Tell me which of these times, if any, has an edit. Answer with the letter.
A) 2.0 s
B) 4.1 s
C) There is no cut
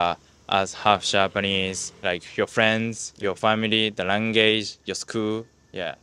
A